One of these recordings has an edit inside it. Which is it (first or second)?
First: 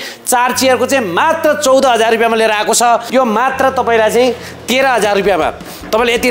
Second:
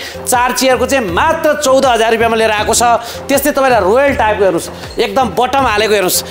first